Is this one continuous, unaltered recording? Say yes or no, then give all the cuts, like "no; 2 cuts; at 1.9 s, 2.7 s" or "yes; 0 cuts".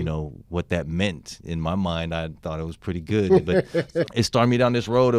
no; 1 cut; at 3.9 s